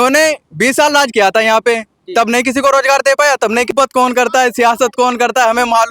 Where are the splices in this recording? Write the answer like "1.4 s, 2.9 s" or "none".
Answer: 3.7 s